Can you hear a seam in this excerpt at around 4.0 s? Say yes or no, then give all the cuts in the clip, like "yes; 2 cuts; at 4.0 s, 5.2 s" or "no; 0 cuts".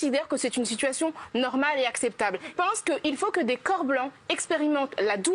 no; 1 cut; at 2.5 s